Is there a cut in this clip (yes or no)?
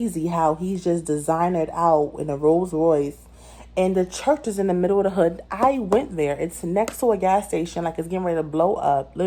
no